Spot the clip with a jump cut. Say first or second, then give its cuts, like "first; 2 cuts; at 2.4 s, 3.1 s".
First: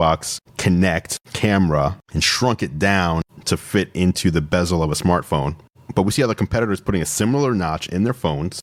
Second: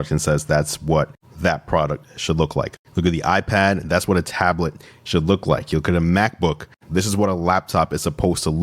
second; 1 cut; at 6.8 s